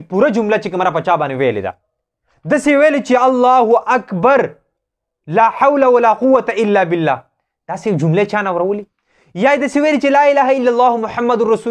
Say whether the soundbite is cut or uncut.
uncut